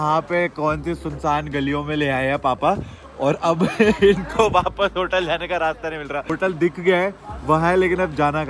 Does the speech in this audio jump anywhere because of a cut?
no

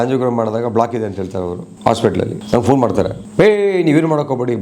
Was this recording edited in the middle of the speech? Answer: yes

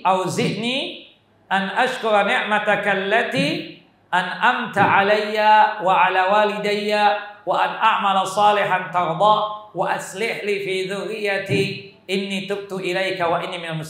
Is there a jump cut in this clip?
no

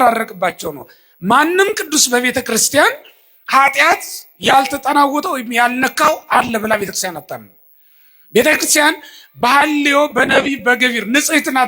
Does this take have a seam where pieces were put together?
no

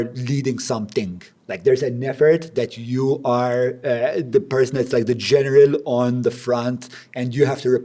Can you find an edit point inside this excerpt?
no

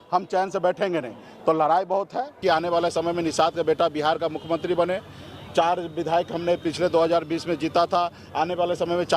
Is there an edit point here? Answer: yes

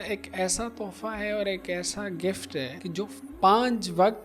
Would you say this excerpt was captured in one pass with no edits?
no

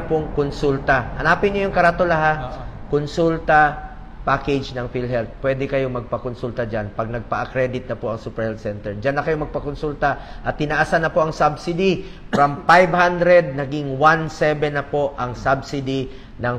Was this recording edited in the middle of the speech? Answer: no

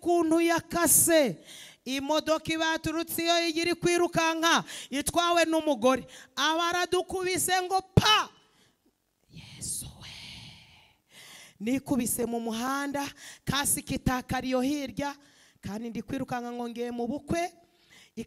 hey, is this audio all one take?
yes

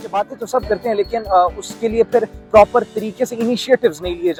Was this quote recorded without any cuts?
yes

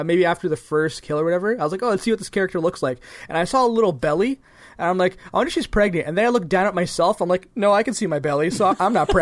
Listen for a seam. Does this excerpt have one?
no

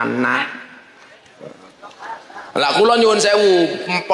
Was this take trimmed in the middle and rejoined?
no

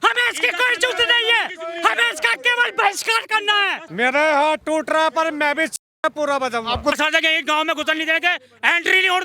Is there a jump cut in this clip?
yes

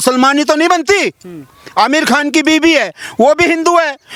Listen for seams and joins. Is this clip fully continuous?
yes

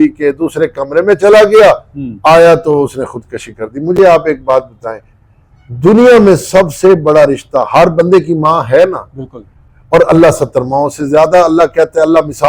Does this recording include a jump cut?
no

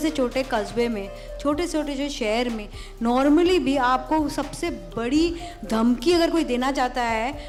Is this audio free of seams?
yes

